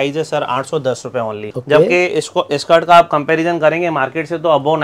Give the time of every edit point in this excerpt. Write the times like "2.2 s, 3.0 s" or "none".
1.5 s

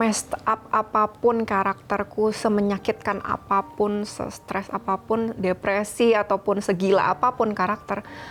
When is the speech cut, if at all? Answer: none

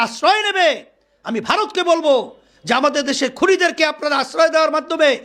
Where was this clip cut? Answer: none

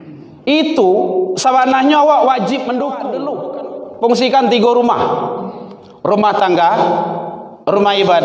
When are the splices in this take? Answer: 3.4 s

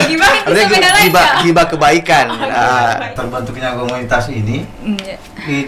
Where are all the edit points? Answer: 3.1 s

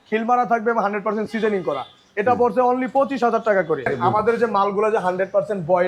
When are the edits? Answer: 3.9 s

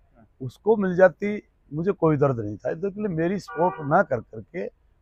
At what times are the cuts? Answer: none

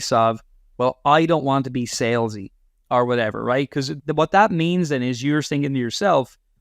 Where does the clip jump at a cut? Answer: 3.9 s

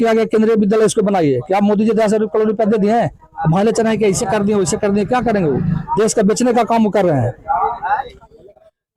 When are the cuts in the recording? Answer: none

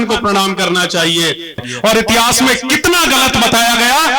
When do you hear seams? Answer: 1.6 s

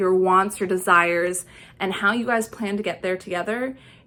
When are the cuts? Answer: none

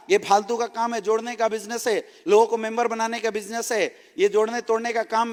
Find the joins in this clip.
none

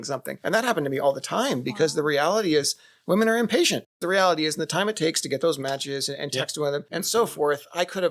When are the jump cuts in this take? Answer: 4.0 s

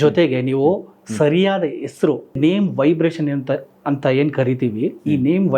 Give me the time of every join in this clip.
2.4 s

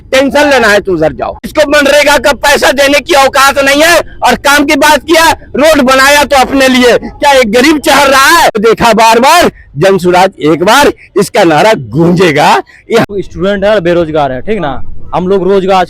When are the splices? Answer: 1.5 s, 8.6 s, 13.1 s

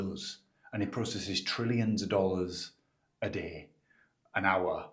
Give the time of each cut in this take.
none

